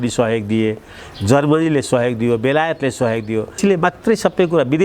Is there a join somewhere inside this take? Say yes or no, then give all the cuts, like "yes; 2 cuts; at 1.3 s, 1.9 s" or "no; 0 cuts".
yes; 1 cut; at 3.6 s